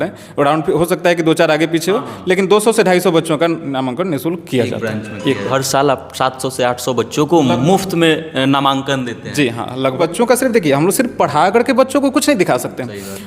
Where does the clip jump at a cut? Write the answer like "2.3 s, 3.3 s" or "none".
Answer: 5.4 s, 10.0 s